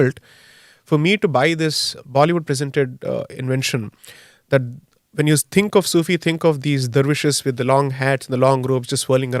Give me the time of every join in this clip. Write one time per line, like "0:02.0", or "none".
none